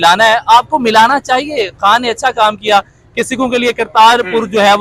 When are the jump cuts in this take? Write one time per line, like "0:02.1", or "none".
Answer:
none